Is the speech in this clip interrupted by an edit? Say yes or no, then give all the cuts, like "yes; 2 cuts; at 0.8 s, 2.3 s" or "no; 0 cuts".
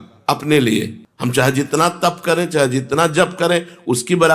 yes; 1 cut; at 1.0 s